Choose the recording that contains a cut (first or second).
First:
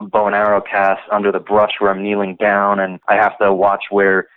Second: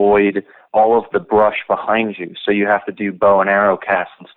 first